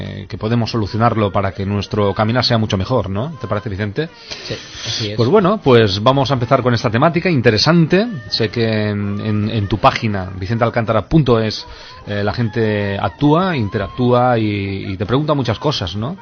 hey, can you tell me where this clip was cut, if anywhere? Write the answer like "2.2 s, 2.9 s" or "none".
4.8 s